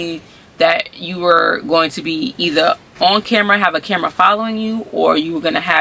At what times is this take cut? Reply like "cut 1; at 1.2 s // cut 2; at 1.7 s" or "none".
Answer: none